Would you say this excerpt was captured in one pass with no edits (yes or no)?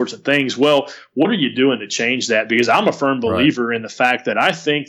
yes